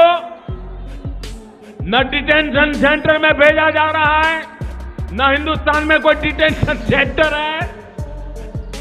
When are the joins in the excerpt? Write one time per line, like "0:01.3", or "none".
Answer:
none